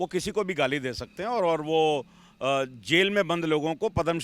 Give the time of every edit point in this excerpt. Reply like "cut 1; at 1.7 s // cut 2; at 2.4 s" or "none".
none